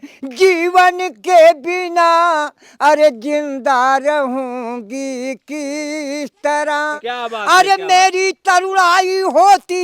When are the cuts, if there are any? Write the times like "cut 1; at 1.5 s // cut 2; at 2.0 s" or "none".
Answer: cut 1; at 7.1 s